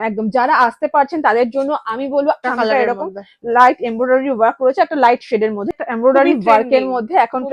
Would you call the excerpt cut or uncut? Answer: cut